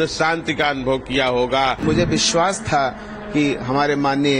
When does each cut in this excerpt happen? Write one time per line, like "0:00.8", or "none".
0:01.8